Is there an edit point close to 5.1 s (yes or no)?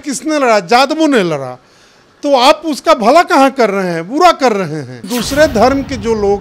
yes